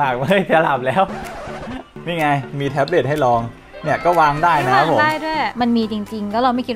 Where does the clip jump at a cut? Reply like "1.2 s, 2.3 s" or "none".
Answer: 2.0 s, 5.5 s